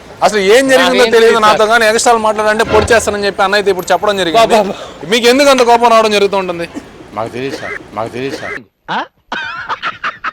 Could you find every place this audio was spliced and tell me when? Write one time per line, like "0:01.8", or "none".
none